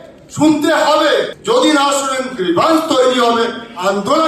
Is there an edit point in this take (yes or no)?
yes